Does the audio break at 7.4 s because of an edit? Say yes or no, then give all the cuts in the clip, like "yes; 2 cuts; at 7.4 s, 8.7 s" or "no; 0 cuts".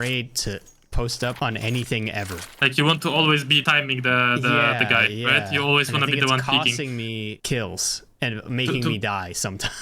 yes; 4 cuts; at 1.4 s, 2.4 s, 3.6 s, 7.4 s